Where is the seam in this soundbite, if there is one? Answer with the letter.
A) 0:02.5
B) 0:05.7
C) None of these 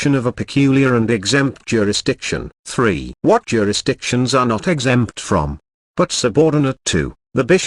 A